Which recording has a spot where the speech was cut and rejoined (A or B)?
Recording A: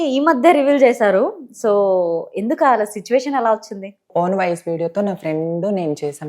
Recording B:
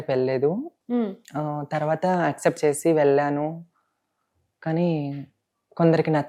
A